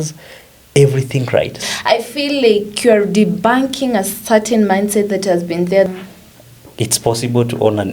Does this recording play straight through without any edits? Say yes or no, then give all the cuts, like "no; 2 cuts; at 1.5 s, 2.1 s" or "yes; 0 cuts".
no; 2 cuts; at 1.6 s, 5.9 s